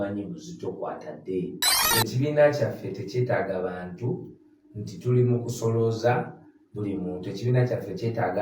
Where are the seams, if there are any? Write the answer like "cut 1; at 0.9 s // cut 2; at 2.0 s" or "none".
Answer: cut 1; at 1.8 s